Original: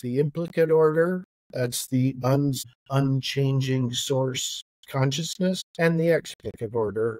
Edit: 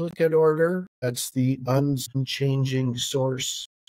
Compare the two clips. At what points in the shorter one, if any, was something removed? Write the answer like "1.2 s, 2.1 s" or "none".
0.9 s, 2.2 s